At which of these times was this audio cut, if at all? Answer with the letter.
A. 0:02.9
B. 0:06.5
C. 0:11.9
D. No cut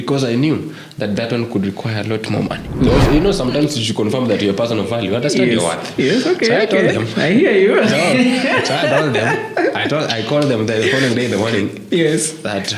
A